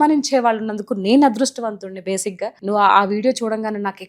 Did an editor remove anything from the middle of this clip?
yes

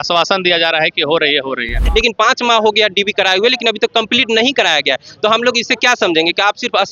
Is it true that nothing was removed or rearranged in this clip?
no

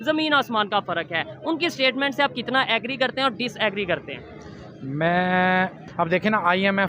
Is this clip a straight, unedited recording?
no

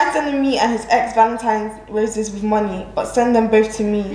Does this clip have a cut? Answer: no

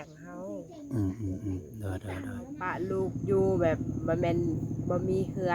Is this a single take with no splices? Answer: no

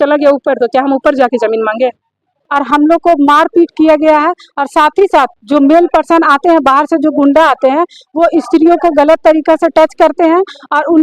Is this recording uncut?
no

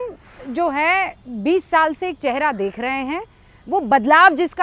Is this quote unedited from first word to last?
yes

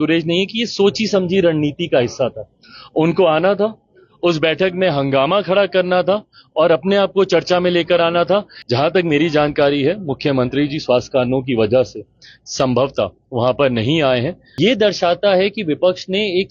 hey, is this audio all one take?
no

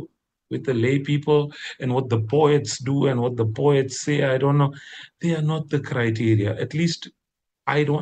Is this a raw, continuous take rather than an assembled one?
yes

